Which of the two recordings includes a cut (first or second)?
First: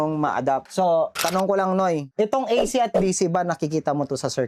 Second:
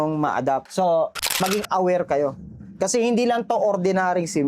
second